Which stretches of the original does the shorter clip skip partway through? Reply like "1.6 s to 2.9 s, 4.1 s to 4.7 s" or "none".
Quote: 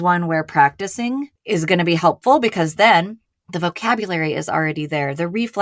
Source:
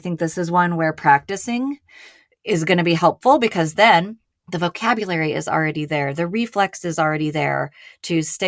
1.8 s to 2.3 s